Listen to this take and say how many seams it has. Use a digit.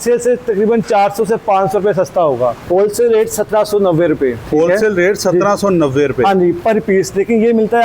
2